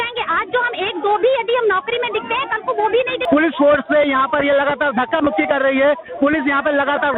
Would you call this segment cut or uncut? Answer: cut